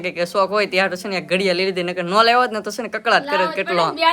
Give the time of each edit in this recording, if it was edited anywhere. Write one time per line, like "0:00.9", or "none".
none

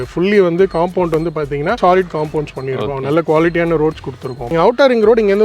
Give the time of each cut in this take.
0:01.8
0:04.4

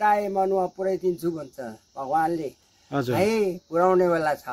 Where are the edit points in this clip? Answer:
none

